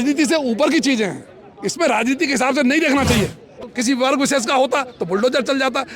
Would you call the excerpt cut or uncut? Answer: cut